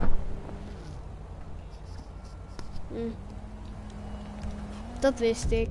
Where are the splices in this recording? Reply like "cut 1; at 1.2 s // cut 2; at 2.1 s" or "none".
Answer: cut 1; at 1.6 s